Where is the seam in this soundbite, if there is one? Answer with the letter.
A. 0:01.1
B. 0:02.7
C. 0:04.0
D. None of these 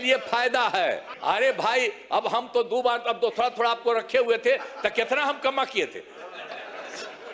A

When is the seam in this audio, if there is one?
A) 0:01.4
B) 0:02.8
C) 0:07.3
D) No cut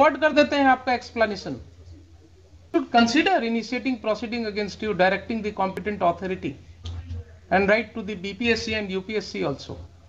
B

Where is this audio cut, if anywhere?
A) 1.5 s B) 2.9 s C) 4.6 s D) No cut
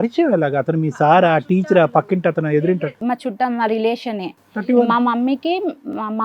D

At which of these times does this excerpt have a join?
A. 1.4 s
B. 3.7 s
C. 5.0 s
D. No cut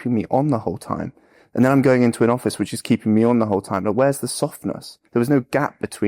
C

